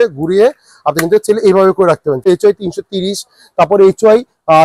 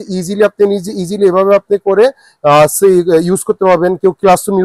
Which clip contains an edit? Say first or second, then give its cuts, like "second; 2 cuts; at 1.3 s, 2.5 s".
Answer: first; 1 cut; at 2.3 s